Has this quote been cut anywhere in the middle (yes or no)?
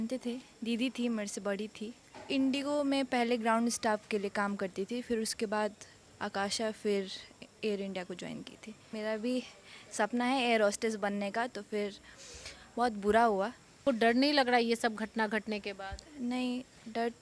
yes